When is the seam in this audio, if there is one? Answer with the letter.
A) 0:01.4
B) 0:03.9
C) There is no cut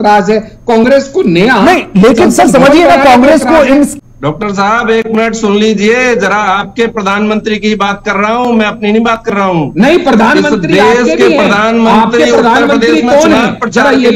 B